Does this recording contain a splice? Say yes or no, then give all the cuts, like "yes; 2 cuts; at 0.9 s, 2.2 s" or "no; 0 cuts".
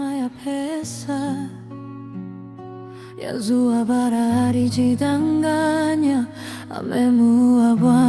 no; 0 cuts